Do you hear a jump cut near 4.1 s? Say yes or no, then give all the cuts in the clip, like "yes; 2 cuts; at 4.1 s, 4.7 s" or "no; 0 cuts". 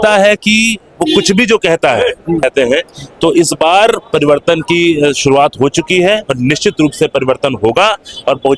no; 1 cut; at 2.4 s